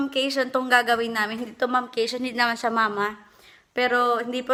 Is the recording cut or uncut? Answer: uncut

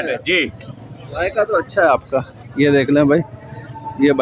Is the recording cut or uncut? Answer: uncut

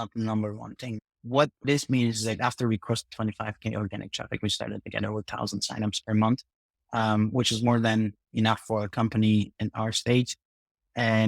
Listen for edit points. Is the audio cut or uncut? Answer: cut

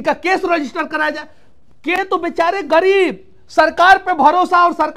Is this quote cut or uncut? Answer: cut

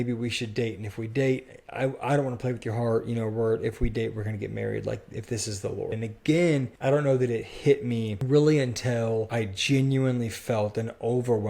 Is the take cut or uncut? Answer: cut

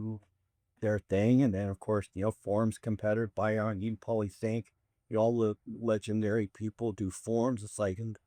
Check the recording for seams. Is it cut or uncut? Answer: uncut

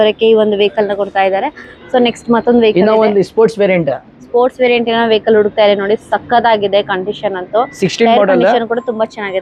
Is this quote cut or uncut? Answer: uncut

